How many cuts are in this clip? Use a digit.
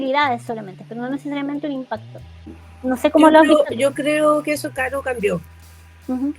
1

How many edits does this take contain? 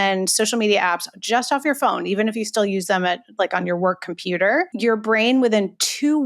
1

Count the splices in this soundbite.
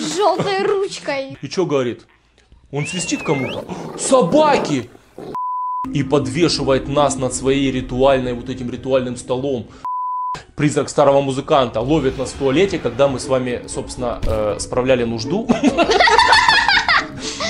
3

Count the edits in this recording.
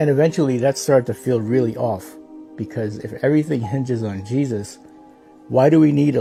0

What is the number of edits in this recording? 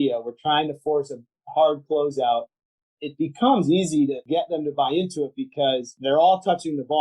3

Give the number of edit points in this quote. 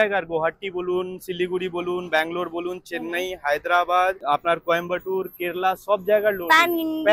1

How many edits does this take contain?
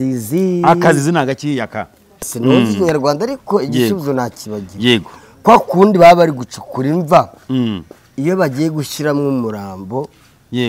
1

